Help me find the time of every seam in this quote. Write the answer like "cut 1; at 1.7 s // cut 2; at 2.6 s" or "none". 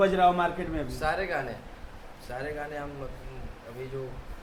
none